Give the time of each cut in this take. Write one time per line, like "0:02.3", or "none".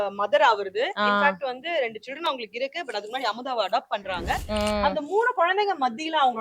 none